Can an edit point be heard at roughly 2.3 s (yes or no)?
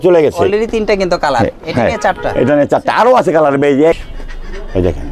no